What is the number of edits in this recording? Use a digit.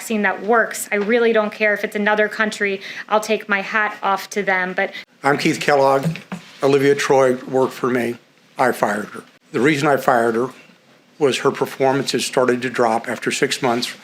1